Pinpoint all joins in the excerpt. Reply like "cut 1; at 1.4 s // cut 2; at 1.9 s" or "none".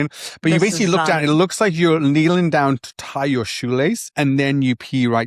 cut 1; at 4.1 s